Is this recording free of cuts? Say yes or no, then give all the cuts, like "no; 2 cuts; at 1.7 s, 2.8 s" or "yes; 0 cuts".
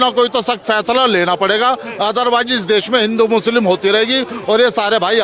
yes; 0 cuts